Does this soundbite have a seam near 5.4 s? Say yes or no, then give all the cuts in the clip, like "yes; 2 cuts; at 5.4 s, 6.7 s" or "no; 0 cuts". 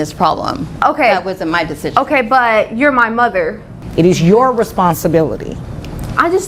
no; 1 cut; at 3.7 s